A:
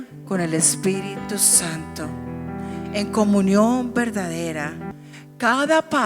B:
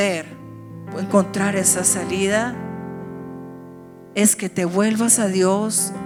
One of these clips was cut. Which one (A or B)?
A